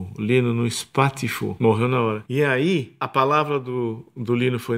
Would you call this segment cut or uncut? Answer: cut